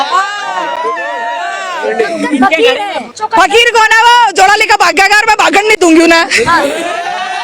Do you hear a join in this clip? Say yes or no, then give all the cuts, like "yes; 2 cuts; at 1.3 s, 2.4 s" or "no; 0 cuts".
yes; 1 cut; at 3.2 s